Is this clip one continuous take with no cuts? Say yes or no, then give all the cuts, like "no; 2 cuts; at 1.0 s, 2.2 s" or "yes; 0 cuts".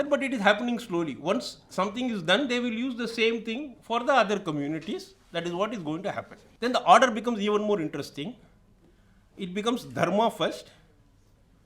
no; 1 cut; at 6.4 s